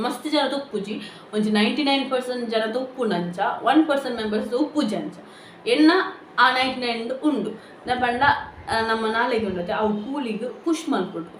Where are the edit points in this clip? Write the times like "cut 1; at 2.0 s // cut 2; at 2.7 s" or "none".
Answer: none